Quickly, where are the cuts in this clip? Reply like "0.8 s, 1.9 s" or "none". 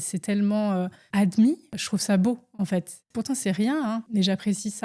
1.0 s, 1.7 s, 3.0 s, 4.1 s